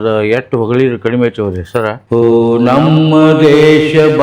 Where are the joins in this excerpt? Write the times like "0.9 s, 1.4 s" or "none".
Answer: 2.0 s